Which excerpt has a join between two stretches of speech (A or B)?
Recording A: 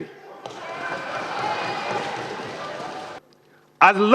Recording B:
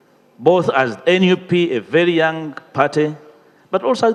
A